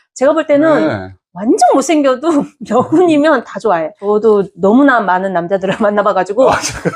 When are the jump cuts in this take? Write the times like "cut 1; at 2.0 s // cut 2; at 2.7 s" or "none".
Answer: cut 1; at 4.0 s